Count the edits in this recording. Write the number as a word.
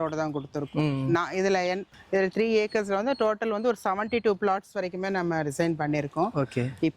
one